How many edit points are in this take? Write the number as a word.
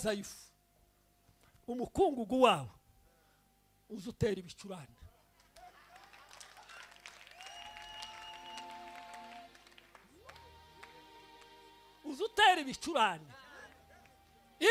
zero